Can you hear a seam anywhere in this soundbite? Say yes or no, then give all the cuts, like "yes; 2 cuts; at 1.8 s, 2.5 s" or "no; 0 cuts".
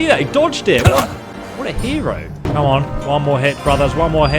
yes; 1 cut; at 2.4 s